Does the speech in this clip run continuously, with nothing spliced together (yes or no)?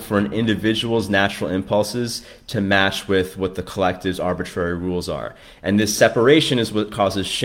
yes